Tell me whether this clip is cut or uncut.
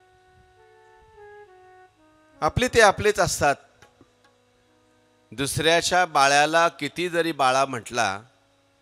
uncut